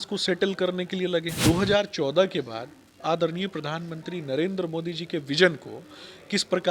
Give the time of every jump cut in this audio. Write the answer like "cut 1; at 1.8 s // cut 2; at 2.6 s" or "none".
cut 1; at 1.3 s